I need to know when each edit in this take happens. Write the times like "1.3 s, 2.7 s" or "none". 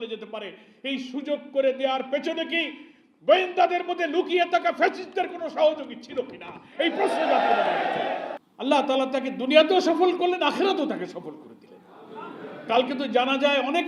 8.4 s